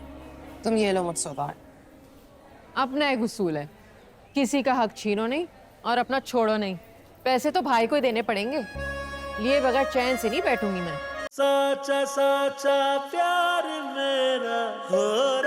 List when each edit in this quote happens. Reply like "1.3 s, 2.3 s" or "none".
11.2 s